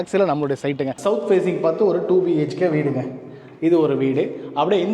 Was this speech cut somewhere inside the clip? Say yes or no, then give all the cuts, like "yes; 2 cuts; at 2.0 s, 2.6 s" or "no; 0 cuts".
yes; 1 cut; at 0.9 s